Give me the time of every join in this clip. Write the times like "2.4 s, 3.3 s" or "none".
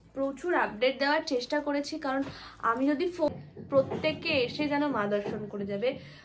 3.3 s